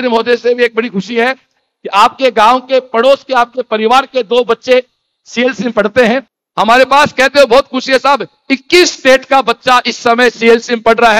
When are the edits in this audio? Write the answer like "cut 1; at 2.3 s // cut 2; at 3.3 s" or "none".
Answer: cut 1; at 6.4 s

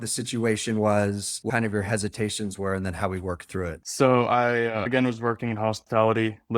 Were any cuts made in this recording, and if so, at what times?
cut 1; at 1.5 s // cut 2; at 4.9 s

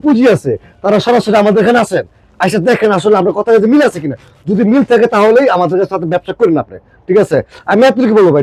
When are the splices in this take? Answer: none

